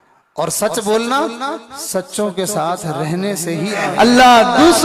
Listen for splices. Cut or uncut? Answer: cut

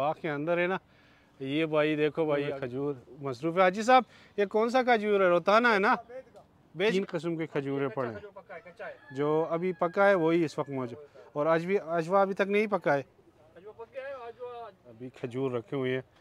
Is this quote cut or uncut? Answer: cut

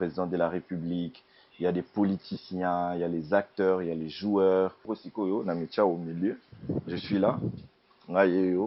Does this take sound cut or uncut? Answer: cut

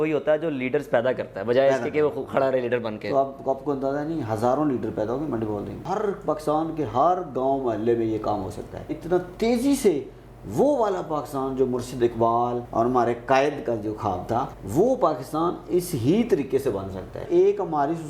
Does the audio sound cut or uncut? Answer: cut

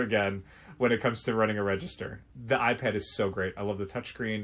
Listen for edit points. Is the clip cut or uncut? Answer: uncut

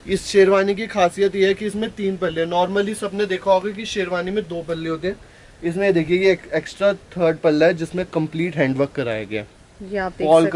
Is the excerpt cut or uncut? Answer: cut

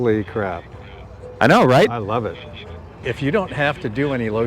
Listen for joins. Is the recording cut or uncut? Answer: cut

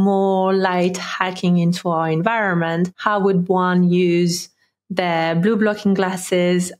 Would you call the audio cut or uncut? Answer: cut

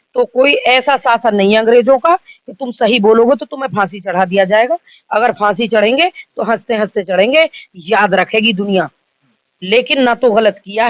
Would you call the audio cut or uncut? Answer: uncut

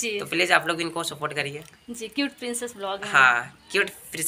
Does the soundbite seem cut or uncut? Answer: uncut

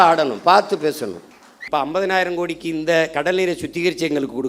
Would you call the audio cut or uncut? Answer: cut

